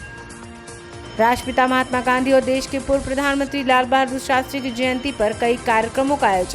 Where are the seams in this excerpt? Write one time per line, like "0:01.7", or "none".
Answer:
0:01.0